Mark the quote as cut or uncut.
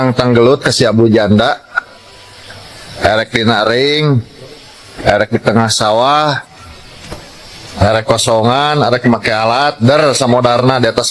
uncut